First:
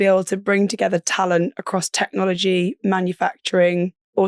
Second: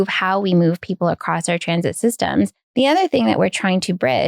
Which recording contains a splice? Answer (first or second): second